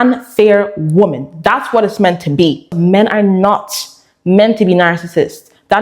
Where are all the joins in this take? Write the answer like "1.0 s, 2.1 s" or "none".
2.7 s